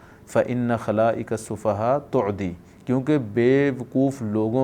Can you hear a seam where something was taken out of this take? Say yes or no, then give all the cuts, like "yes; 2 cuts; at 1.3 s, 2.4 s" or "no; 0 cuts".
no; 0 cuts